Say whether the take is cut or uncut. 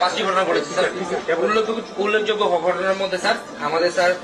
uncut